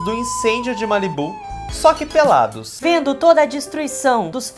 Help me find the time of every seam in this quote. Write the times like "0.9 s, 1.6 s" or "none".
none